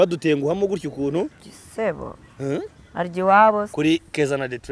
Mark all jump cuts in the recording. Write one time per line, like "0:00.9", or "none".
0:03.7